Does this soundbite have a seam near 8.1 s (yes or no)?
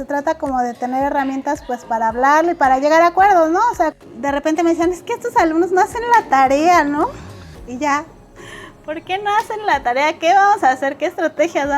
no